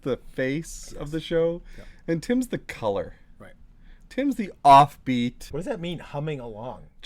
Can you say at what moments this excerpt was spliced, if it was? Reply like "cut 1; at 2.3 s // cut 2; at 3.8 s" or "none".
cut 1; at 5.5 s